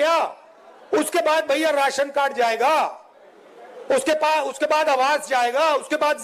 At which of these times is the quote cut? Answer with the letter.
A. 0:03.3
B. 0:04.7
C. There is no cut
C